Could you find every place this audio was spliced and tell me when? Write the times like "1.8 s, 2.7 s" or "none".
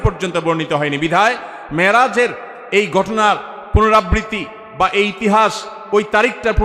none